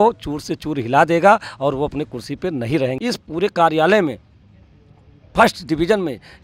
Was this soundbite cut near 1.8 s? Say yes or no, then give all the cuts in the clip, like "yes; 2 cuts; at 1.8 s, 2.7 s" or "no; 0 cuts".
no; 1 cut; at 3.5 s